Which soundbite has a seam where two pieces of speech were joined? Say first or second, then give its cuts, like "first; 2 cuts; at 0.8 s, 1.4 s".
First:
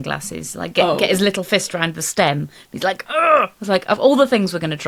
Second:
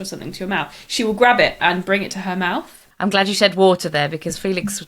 second; 1 cut; at 2.9 s